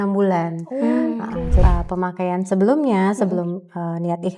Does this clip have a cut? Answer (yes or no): yes